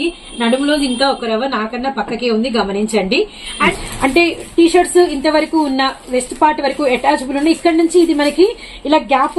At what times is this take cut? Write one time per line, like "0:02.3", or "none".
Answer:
0:03.7